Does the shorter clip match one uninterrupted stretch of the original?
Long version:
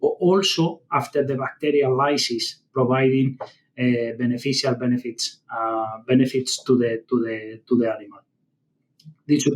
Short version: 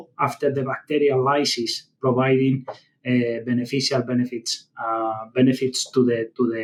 yes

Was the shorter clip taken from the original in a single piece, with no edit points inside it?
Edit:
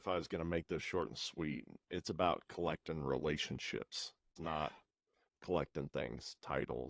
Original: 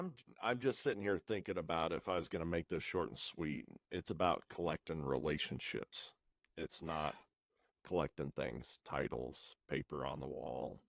no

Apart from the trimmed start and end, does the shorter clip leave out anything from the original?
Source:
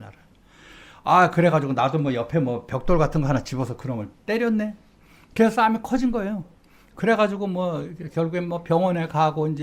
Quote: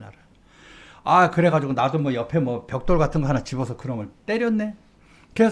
no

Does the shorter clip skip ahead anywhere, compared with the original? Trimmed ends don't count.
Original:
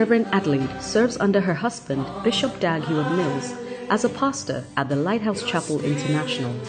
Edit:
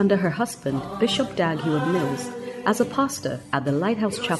no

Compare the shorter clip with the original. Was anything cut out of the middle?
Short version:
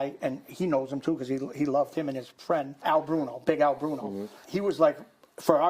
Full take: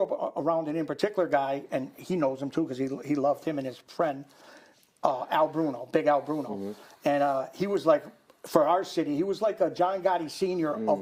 yes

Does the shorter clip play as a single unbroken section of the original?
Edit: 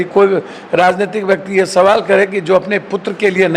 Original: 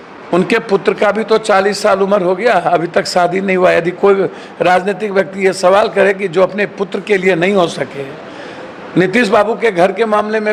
yes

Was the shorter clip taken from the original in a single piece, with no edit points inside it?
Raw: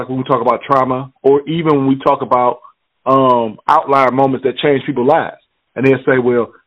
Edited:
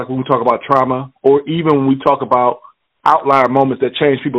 no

